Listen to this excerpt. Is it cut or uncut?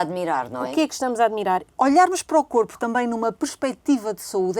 cut